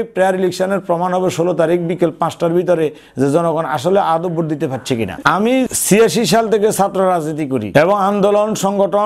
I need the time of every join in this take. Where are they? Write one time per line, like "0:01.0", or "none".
0:05.1